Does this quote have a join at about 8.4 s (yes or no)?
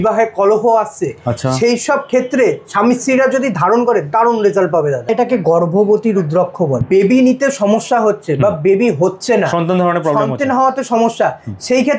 no